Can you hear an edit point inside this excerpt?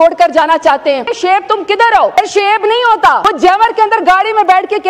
yes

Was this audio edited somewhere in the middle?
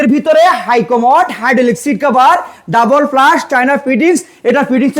no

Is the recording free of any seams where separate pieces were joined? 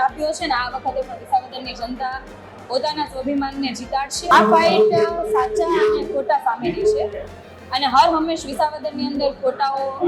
no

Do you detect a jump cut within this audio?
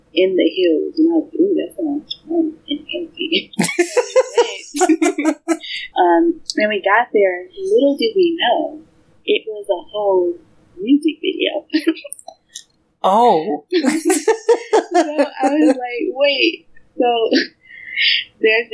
yes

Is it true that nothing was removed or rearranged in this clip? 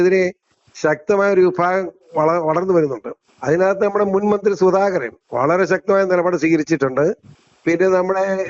yes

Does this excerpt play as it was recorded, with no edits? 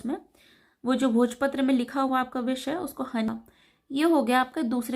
no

